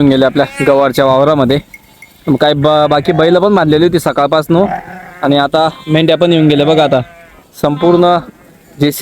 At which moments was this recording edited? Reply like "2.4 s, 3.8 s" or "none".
none

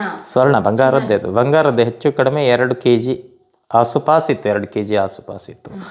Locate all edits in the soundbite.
none

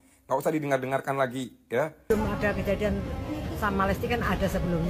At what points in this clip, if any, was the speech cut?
2.1 s

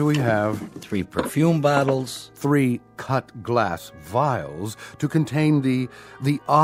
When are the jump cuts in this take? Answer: none

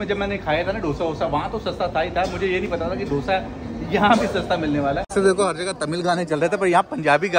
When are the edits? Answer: 5.1 s

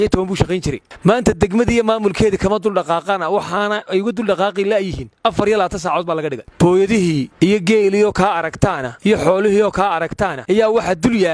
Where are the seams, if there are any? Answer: none

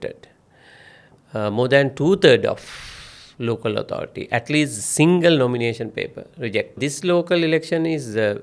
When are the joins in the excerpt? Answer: 6.8 s

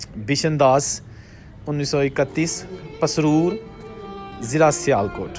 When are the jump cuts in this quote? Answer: none

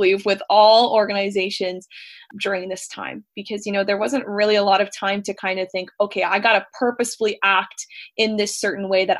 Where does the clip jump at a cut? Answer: 2.2 s

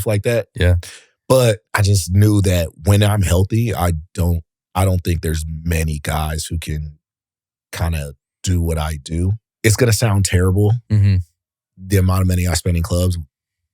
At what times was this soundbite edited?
1.7 s, 4.5 s, 9.4 s

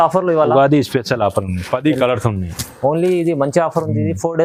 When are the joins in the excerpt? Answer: none

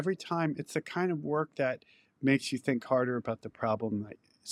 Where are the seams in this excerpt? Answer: none

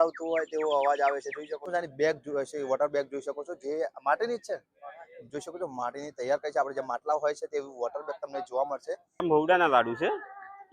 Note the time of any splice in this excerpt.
1.7 s, 9.2 s

